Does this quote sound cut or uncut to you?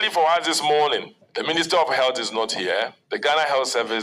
cut